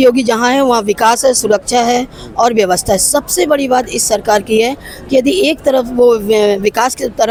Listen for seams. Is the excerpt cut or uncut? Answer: uncut